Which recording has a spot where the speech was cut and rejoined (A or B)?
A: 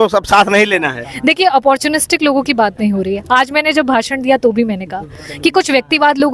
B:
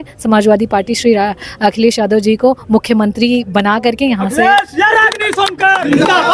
B